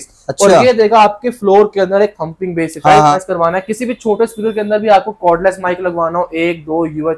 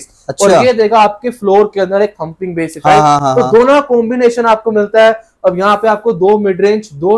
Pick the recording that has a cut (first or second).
first